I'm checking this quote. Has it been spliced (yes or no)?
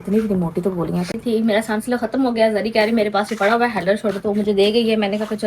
yes